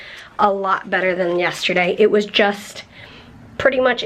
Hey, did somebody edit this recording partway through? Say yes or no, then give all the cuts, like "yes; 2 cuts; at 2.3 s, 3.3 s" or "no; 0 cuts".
no; 0 cuts